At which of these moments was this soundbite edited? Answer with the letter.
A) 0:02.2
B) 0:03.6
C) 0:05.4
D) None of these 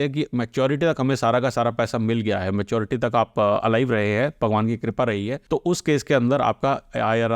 C